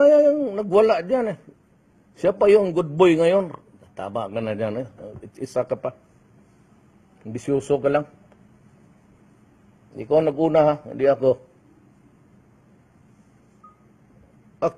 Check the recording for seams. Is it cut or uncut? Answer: uncut